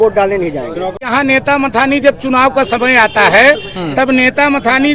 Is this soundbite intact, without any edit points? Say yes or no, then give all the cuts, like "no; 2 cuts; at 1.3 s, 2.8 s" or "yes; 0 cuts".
no; 1 cut; at 1.0 s